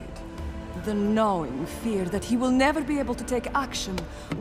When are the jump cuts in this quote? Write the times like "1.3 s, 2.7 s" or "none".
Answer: none